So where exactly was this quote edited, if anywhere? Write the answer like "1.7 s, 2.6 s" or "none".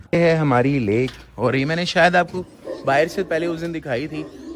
none